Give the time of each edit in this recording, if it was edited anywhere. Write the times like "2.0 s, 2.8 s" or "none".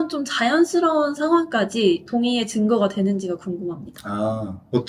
none